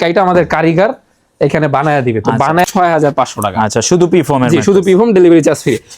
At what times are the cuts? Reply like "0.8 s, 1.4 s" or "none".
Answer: 2.7 s